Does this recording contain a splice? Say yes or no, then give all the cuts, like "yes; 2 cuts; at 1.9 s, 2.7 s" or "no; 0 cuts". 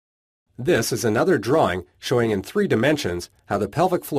no; 0 cuts